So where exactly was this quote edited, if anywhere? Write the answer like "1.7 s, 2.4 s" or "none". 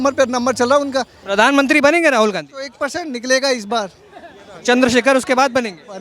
1.2 s